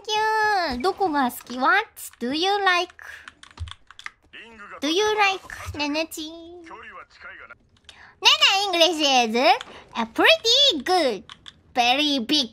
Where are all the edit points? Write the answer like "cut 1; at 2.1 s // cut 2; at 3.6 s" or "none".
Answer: none